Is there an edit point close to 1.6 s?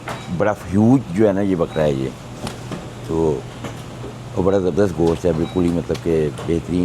no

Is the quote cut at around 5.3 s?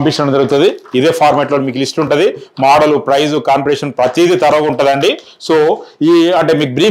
no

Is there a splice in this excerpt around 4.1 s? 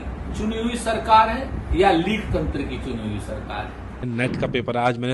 yes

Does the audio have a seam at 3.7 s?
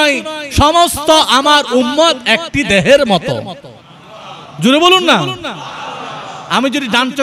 no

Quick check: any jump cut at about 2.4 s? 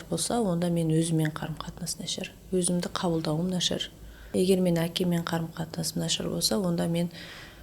no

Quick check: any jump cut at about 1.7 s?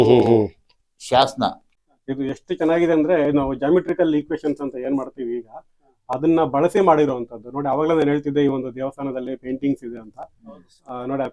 yes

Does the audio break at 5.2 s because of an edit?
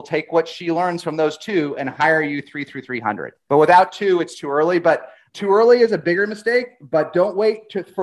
yes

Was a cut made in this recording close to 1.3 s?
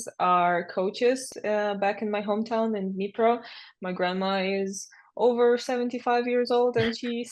yes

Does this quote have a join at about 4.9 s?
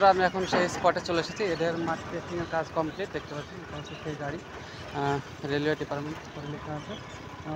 no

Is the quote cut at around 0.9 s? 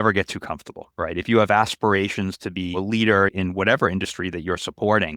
no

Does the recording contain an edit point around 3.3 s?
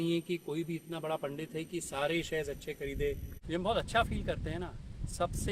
yes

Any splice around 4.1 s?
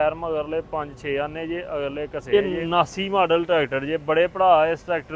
no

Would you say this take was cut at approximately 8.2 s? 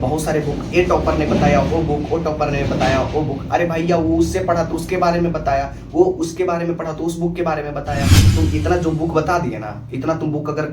yes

